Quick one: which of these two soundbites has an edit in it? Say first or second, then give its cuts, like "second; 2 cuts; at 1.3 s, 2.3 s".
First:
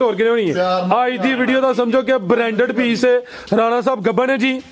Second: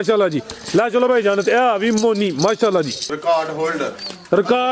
second; 1 cut; at 3.0 s